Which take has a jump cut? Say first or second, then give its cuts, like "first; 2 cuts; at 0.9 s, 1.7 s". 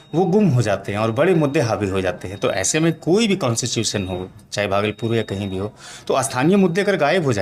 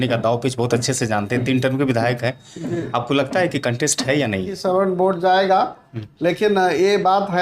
second; 1 cut; at 4.5 s